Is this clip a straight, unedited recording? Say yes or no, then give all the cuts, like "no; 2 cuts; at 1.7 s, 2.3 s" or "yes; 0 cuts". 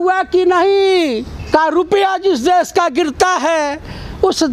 no; 1 cut; at 1.3 s